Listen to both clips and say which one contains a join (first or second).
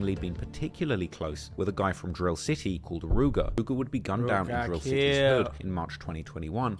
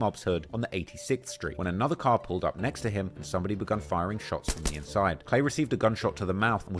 first